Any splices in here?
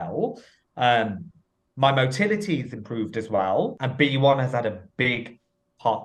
yes; 1 cut; at 3.8 s

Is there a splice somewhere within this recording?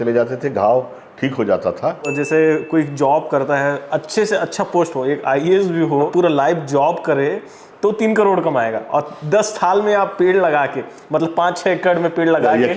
yes; 1 cut; at 2.1 s

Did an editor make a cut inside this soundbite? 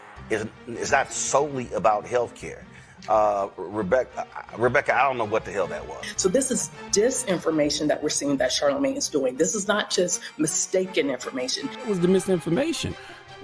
yes; 2 cuts; at 6.1 s, 11.9 s

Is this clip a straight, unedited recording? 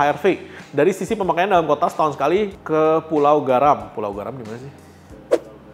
yes; 0 cuts

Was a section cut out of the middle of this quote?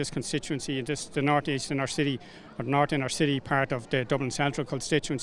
no; 0 cuts

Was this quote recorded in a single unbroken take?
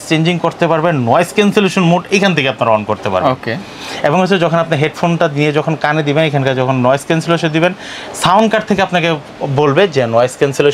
yes; 0 cuts

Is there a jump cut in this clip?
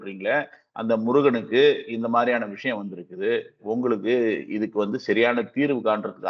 no; 0 cuts

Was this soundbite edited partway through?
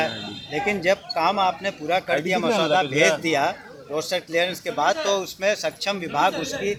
no; 0 cuts

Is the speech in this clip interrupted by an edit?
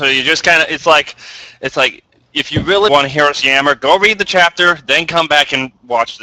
yes; 1 cut; at 2.9 s

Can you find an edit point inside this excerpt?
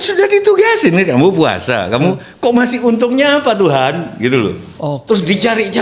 no; 0 cuts

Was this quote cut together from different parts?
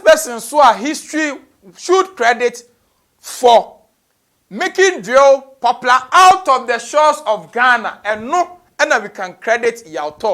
no; 0 cuts

